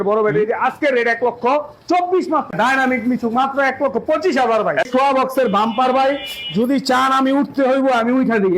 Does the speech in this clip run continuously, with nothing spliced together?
no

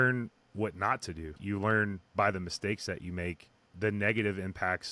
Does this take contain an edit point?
yes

